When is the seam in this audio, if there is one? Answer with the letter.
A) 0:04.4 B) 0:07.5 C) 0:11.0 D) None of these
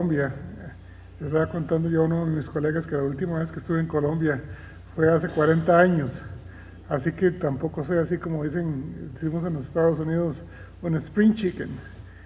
D